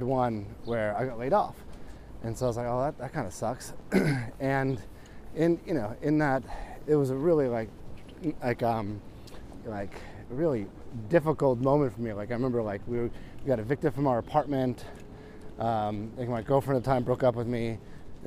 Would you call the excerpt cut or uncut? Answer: uncut